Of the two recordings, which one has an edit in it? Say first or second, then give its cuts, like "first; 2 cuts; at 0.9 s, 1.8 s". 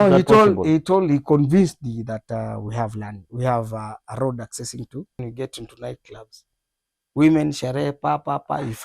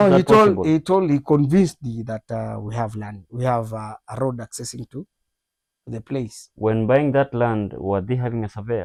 first; 1 cut; at 5.2 s